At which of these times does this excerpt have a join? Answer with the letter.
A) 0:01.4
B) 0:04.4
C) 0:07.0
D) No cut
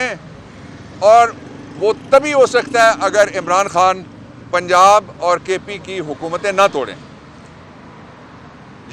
D